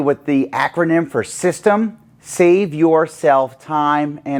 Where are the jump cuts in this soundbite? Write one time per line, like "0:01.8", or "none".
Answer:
none